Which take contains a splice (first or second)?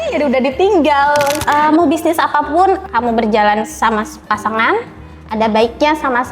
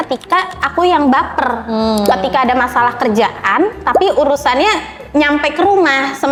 first